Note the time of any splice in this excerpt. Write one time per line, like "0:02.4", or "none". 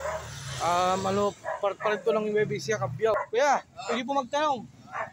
0:03.1